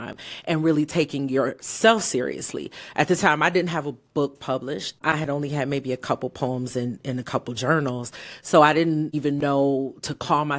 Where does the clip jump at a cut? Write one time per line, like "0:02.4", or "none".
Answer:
0:05.0
0:09.1